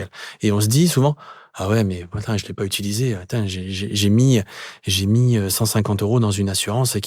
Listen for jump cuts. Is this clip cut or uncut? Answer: uncut